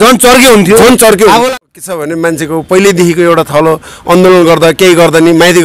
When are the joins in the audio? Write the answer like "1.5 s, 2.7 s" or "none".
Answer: 1.5 s